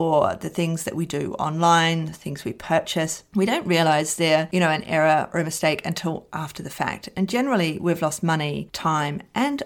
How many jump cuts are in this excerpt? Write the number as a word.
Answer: zero